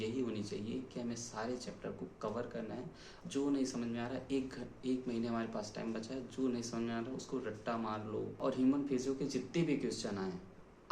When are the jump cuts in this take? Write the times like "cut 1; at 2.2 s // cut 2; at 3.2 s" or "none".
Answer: cut 1; at 3.2 s // cut 2; at 8.5 s